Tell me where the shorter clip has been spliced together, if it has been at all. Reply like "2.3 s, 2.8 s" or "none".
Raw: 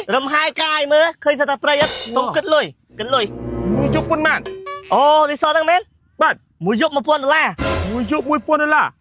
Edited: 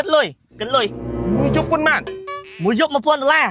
2.4 s